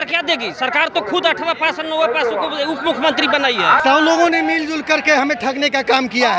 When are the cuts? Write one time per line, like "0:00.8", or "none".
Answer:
0:03.8